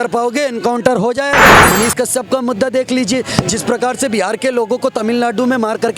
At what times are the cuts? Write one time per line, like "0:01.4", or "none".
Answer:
0:01.7